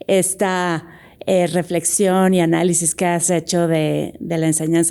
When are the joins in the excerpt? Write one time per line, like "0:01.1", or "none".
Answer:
none